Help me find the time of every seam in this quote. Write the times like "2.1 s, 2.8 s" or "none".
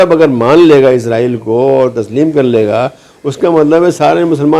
none

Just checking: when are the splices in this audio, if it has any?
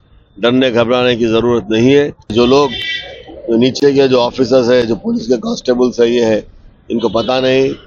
2.3 s

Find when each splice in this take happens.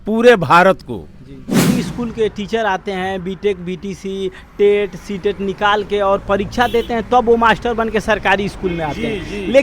1.7 s

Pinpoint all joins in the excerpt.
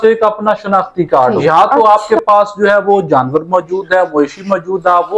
1.4 s

